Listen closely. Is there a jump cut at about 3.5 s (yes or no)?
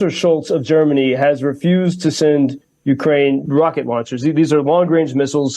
yes